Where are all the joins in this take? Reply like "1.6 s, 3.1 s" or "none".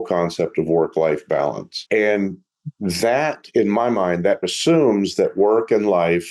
1.7 s, 4.5 s